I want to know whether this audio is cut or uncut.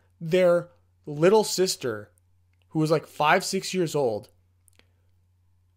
uncut